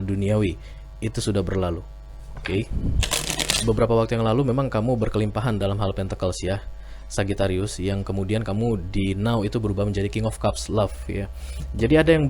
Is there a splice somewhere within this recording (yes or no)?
yes